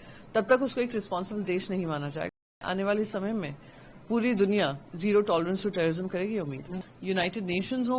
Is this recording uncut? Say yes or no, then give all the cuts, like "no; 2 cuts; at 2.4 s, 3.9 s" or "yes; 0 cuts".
no; 2 cuts; at 2.4 s, 6.9 s